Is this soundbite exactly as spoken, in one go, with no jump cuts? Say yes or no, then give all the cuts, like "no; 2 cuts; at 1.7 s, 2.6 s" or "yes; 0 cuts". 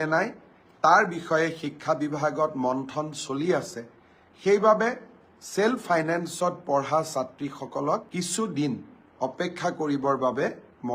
no; 2 cuts; at 8.1 s, 9.1 s